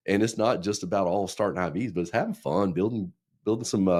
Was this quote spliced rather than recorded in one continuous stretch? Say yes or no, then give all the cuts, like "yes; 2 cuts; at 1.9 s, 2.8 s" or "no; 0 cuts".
no; 0 cuts